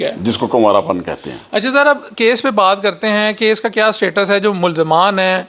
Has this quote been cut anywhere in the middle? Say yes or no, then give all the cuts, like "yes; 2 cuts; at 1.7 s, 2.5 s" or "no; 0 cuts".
no; 0 cuts